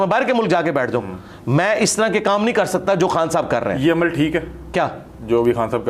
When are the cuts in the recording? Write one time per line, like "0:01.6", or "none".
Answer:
none